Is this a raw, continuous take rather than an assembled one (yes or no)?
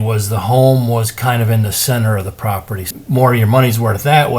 no